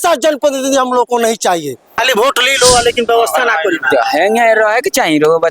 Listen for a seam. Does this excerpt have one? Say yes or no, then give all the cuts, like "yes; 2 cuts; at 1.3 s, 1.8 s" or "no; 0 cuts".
yes; 1 cut; at 2.0 s